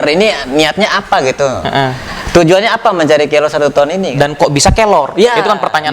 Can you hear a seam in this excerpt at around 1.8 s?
no; 1 cut; at 4.1 s

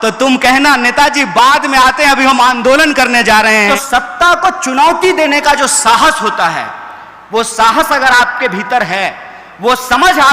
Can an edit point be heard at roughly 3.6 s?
yes; 1 cut; at 3.6 s

